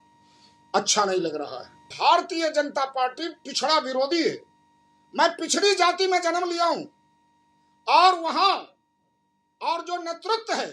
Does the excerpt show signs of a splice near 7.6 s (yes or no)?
no